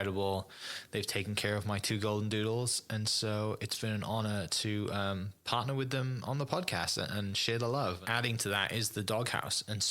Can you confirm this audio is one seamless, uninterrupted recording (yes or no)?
no